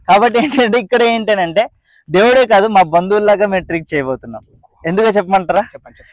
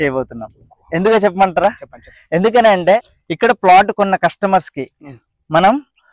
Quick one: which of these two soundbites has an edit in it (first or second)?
second